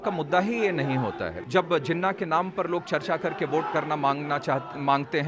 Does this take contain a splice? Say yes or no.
yes